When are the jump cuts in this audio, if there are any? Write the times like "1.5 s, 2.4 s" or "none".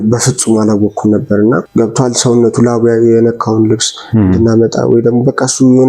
1.7 s